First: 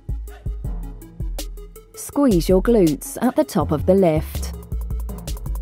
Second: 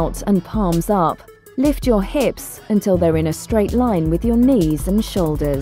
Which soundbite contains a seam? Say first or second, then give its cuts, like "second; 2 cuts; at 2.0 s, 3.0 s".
first; 2 cuts; at 2.1 s, 4.3 s